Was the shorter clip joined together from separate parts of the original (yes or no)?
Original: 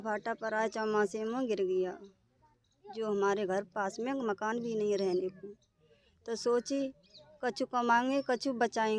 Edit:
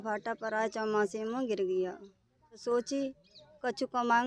yes